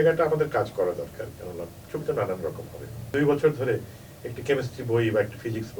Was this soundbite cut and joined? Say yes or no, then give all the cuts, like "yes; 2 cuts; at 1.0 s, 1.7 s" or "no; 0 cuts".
yes; 1 cut; at 3.1 s